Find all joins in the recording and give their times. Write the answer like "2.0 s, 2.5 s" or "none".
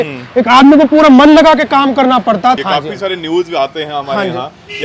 2.6 s